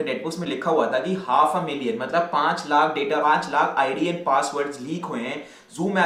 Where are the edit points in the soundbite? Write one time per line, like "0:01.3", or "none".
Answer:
none